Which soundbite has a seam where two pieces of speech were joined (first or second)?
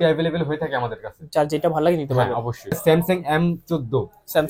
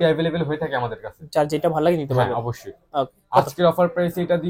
first